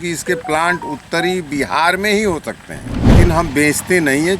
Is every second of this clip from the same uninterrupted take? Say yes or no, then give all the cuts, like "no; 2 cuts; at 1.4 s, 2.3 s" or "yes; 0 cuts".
no; 1 cut; at 3.1 s